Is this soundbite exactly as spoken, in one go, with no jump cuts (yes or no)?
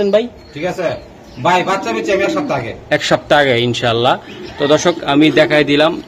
yes